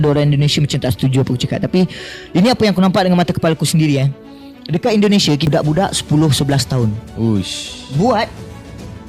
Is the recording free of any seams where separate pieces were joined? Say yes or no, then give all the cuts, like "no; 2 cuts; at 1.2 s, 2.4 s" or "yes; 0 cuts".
no; 1 cut; at 5.4 s